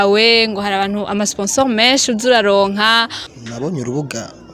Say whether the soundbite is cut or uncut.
cut